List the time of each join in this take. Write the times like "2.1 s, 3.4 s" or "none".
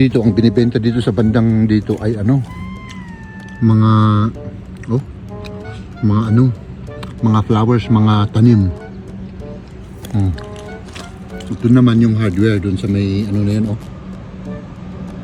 none